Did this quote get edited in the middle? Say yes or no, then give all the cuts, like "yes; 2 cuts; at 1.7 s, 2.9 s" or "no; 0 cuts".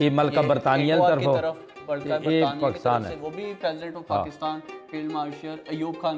no; 0 cuts